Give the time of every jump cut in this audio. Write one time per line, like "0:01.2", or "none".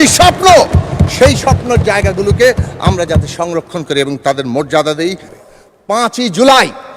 0:05.3